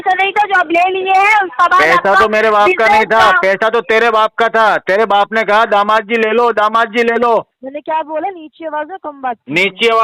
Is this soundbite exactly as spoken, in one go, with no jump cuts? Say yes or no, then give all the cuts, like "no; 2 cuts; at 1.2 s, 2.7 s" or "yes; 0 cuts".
no; 1 cut; at 7.6 s